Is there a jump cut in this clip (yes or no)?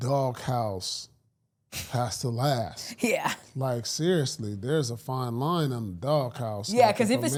no